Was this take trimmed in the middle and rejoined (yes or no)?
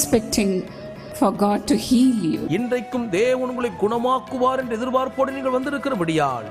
yes